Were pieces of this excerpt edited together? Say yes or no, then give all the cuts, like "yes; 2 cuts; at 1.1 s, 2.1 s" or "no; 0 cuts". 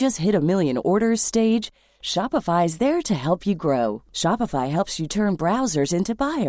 no; 0 cuts